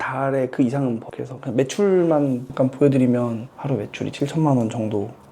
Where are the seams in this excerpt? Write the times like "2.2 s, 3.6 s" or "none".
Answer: 3.5 s